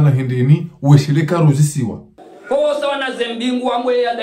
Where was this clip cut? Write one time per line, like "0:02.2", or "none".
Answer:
none